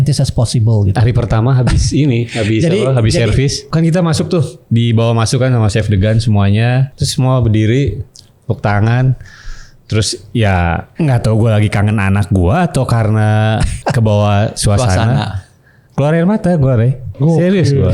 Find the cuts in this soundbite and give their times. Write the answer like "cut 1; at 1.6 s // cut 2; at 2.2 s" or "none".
cut 1; at 0.9 s // cut 2; at 3.7 s // cut 3; at 6.9 s // cut 4; at 10.9 s // cut 5; at 13.7 s